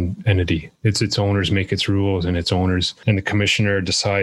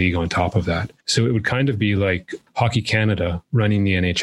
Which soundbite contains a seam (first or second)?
second